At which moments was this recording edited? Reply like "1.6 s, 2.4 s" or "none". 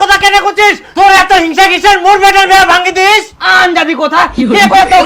none